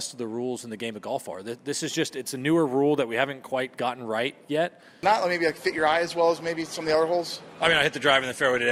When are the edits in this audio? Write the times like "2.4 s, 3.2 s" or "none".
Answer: none